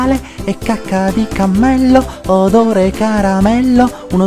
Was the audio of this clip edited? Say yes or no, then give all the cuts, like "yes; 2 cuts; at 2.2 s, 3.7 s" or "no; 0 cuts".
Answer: no; 0 cuts